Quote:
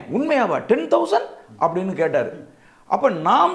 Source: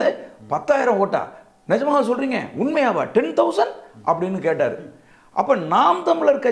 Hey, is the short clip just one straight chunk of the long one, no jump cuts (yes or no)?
yes